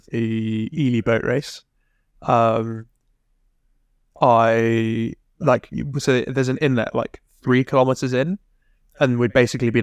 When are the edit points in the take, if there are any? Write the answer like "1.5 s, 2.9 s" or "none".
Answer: none